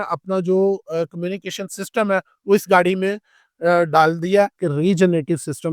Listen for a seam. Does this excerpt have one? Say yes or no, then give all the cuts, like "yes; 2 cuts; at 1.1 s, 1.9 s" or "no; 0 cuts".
yes; 1 cut; at 4.6 s